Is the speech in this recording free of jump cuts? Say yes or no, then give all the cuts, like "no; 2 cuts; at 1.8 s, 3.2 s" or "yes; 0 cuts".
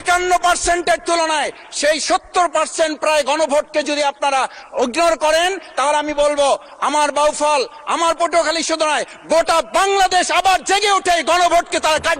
yes; 0 cuts